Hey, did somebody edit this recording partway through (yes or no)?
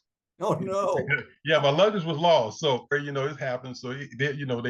yes